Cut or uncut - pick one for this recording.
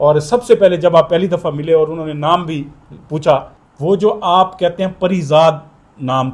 cut